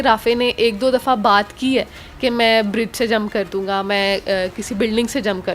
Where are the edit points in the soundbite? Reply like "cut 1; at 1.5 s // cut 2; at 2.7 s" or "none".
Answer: none